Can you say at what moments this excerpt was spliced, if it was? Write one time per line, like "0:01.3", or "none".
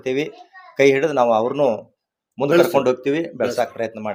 none

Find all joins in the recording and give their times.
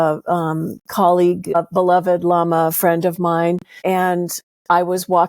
0:01.5
0:03.7

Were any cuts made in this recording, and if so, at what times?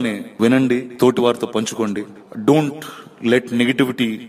none

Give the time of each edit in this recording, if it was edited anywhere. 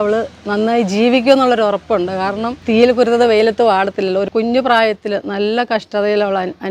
0:02.6
0:04.3

